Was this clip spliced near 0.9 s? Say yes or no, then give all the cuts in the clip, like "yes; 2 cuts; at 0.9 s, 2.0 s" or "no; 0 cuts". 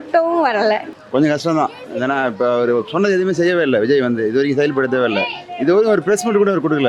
yes; 1 cut; at 0.9 s